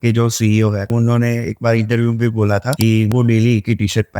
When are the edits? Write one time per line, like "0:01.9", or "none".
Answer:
0:00.9
0:03.1